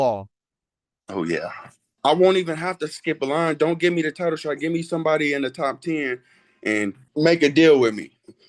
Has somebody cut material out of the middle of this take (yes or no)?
yes